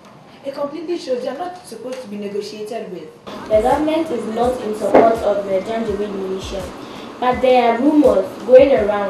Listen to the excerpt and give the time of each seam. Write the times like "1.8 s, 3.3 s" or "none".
3.3 s